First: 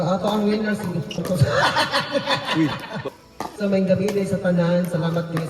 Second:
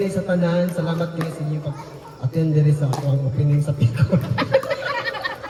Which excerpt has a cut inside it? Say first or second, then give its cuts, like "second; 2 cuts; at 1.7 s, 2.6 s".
first; 2 cuts; at 1.2 s, 3.2 s